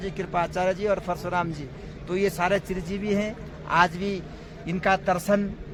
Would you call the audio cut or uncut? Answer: uncut